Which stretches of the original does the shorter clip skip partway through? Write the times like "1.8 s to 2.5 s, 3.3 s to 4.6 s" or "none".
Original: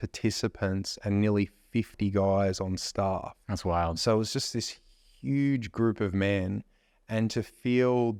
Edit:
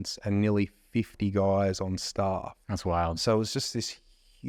none